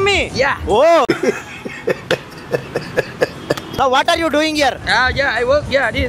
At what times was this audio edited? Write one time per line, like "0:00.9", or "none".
0:01.1
0:03.7